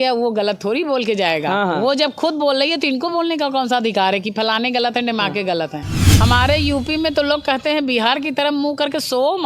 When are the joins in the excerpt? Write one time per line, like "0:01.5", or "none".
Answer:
0:06.0